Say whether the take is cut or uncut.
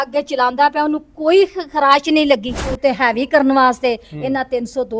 cut